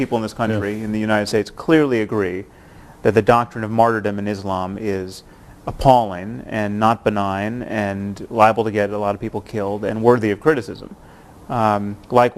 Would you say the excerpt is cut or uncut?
cut